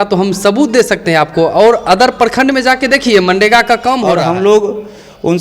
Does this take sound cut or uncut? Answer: cut